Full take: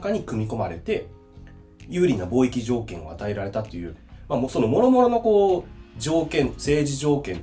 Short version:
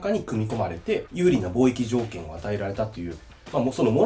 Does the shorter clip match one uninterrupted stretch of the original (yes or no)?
no